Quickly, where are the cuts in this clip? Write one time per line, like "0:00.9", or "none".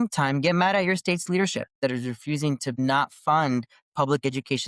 0:01.7
0:02.7